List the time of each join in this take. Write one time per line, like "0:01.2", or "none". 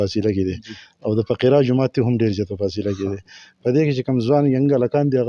none